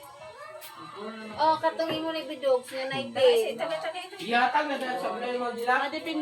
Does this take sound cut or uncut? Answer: uncut